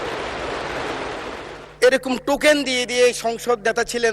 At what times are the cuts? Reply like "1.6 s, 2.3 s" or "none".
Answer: 1.4 s